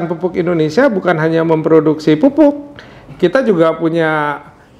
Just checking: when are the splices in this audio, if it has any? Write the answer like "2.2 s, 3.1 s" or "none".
none

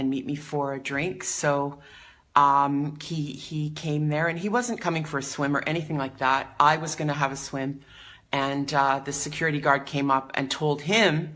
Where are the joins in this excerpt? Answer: none

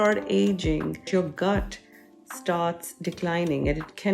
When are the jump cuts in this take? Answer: 1.1 s

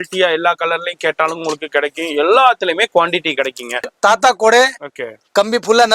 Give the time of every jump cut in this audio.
3.9 s

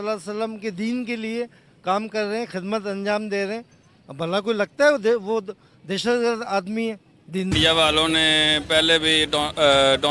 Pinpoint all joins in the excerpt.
7.5 s

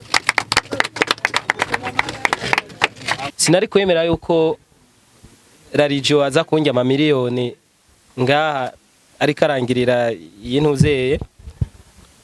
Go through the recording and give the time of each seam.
3.3 s

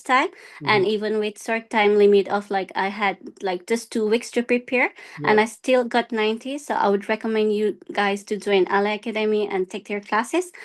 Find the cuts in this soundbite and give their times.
none

